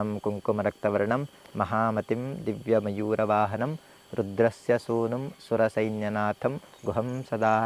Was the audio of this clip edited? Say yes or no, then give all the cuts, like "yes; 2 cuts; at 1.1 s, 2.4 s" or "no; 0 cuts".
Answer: no; 0 cuts